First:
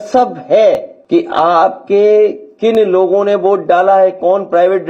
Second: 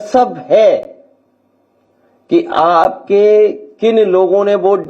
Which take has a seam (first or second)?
first